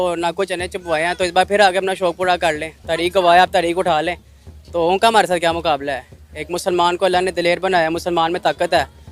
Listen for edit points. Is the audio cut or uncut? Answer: uncut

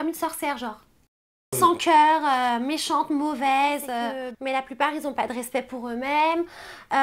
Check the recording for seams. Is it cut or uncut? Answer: cut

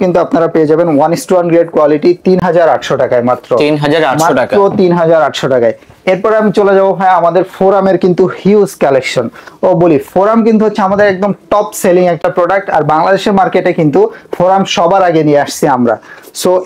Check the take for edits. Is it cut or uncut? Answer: uncut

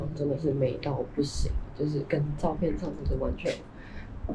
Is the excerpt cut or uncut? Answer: uncut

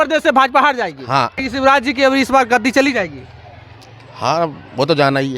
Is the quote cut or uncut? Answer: cut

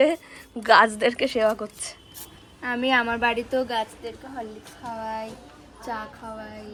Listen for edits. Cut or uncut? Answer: uncut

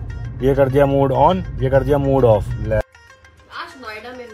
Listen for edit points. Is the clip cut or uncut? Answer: cut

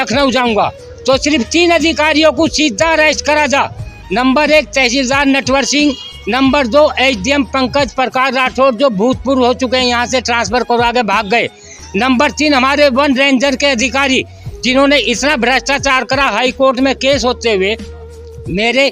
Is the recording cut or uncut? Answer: uncut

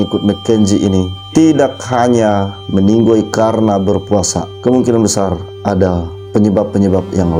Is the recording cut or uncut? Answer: uncut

